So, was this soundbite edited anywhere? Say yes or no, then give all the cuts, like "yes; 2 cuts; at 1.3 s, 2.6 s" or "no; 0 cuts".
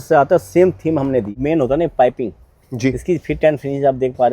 yes; 1 cut; at 1.3 s